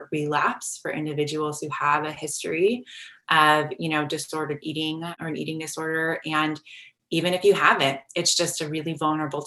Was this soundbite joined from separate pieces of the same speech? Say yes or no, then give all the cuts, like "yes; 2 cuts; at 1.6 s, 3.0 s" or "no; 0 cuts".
yes; 1 cut; at 5.2 s